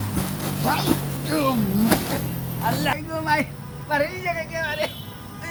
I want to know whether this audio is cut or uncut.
uncut